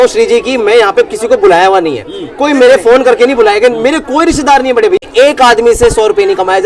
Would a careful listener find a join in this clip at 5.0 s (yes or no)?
yes